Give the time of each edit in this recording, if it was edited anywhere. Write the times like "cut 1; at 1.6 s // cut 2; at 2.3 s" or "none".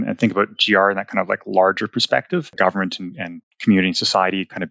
cut 1; at 2.5 s